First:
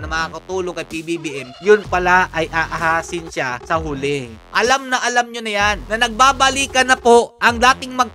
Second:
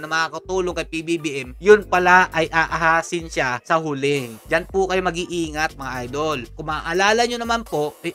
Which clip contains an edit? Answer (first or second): first